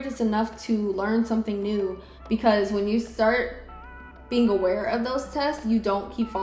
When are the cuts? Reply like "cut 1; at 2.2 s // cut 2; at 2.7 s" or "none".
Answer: cut 1; at 2.1 s